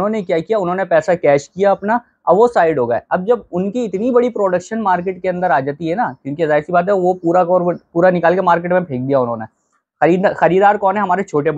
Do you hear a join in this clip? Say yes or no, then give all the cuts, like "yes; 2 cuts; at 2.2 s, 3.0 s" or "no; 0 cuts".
no; 0 cuts